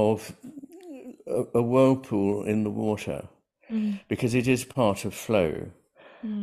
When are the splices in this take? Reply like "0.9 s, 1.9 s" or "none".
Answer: none